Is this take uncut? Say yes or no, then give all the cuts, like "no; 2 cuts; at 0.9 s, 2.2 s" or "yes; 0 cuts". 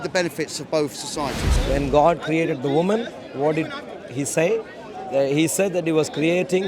no; 1 cut; at 1.5 s